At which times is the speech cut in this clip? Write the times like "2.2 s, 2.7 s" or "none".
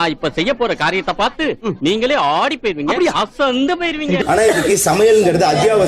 4.2 s